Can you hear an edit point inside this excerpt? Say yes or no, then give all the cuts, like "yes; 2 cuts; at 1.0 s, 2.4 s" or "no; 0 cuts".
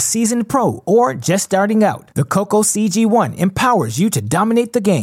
no; 0 cuts